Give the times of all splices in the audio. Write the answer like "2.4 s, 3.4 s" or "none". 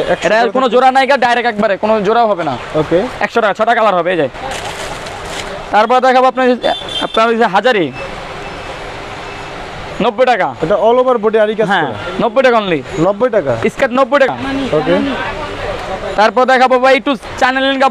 none